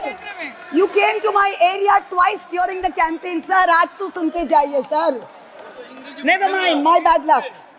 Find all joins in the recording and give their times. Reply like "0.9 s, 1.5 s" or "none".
none